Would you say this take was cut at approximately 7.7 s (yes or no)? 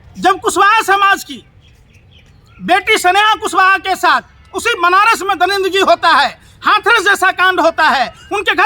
yes